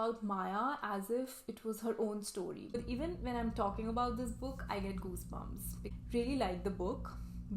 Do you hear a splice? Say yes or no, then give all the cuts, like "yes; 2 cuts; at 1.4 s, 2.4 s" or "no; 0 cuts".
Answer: yes; 2 cuts; at 2.8 s, 5.8 s